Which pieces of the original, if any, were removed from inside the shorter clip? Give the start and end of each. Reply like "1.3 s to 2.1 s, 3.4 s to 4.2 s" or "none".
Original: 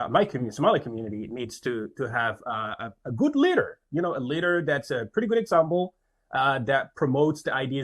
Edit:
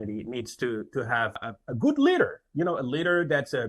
2.4 s to 2.7 s